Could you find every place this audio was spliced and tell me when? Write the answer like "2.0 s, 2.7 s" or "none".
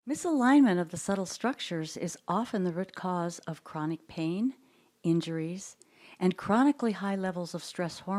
none